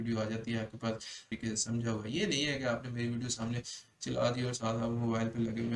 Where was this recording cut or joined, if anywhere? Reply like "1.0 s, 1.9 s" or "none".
1.2 s